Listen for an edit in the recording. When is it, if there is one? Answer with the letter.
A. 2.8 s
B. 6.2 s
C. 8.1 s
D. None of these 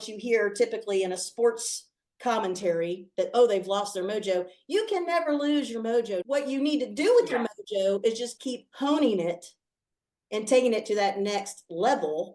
B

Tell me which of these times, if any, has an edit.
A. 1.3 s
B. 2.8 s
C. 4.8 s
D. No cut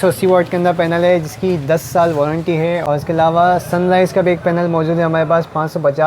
B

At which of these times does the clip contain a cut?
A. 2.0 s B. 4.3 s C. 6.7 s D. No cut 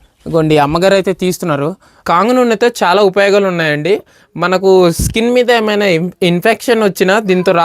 A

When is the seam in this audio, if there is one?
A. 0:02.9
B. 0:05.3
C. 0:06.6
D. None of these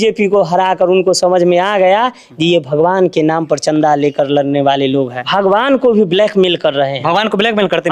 B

